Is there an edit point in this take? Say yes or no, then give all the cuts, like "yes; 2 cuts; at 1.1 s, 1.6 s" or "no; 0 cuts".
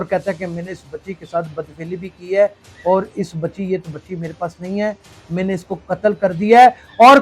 no; 0 cuts